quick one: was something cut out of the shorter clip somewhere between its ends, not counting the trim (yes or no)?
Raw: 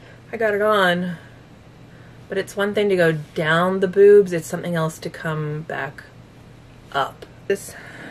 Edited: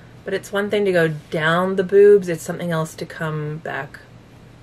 no